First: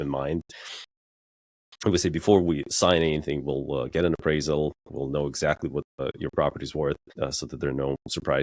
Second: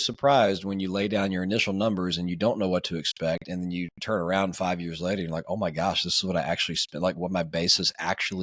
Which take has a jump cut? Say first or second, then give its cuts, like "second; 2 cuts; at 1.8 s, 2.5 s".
first; 2 cuts; at 6.0 s, 7.1 s